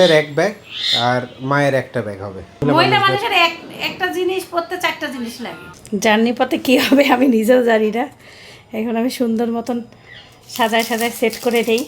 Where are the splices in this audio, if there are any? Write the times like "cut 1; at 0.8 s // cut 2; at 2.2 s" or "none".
cut 1; at 2.6 s // cut 2; at 5.7 s